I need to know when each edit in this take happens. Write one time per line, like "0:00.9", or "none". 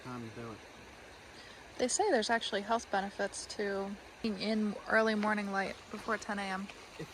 0:04.2